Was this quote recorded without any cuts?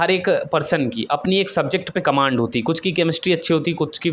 yes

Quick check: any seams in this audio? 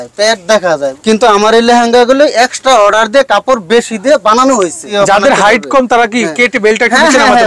yes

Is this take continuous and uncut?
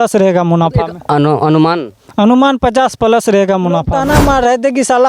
no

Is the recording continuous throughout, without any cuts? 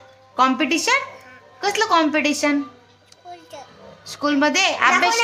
yes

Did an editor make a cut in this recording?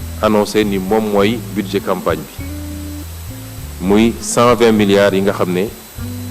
yes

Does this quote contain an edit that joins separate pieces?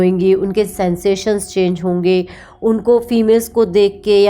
no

